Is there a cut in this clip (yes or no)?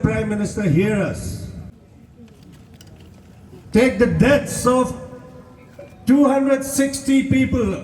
yes